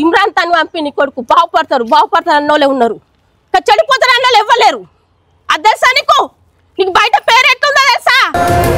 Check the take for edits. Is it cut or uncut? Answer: uncut